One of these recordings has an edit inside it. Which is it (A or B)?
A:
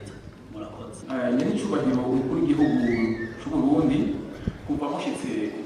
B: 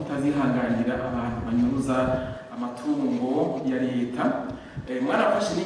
A